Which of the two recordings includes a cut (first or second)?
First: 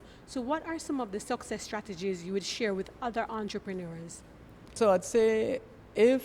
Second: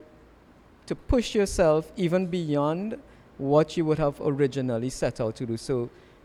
first